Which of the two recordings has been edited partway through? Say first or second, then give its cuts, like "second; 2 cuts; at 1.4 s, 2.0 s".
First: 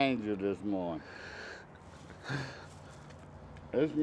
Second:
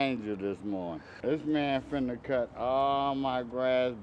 second; 1 cut; at 1.1 s